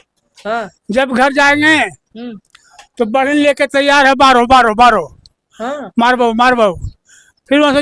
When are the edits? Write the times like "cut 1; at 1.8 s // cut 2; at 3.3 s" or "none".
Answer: none